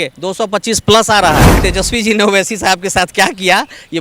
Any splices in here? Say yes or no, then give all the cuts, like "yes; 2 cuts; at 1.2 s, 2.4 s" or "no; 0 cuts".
yes; 1 cut; at 1.6 s